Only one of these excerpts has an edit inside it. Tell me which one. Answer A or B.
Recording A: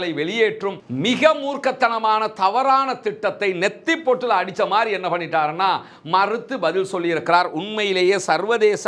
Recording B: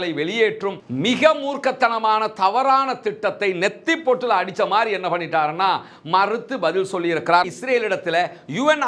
B